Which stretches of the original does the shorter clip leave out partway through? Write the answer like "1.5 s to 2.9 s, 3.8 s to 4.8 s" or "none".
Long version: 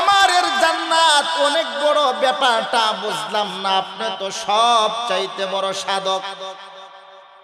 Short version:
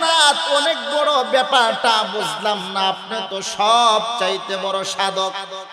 none